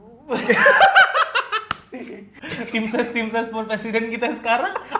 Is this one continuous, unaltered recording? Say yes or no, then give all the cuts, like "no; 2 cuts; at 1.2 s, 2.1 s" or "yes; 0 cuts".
no; 1 cut; at 2.4 s